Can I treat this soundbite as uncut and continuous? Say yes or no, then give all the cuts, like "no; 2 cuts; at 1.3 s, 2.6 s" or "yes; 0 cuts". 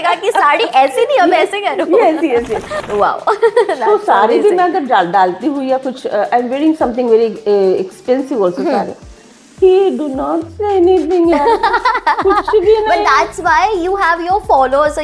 no; 1 cut; at 2.8 s